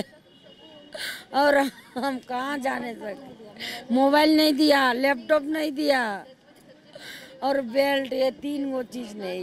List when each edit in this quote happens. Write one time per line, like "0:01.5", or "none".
none